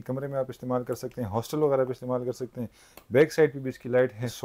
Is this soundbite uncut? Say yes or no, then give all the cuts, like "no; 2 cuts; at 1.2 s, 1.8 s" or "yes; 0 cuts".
yes; 0 cuts